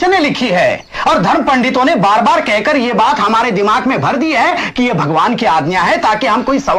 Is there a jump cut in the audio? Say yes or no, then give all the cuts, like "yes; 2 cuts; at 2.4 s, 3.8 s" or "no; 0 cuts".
no; 0 cuts